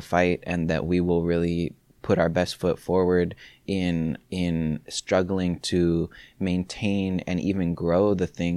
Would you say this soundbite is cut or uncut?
uncut